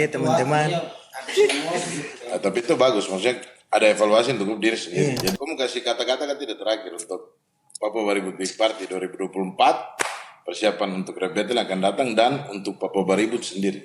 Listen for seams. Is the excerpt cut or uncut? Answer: cut